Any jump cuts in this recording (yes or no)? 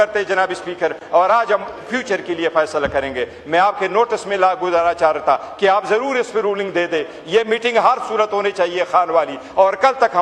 no